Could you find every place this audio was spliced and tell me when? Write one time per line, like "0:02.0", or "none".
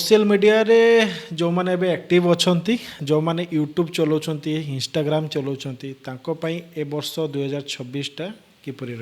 0:03.0